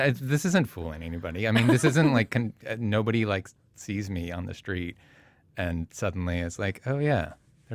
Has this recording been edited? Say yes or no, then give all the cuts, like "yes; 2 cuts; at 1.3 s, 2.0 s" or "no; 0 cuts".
no; 0 cuts